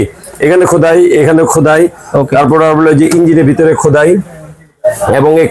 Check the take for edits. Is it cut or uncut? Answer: uncut